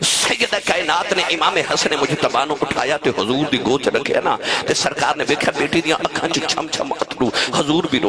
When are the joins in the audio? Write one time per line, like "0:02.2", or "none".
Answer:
none